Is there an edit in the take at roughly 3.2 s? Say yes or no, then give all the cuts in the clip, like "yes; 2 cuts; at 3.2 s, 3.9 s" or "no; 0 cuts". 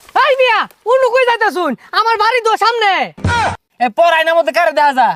yes; 1 cut; at 3.2 s